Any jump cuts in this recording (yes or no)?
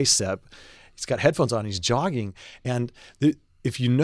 no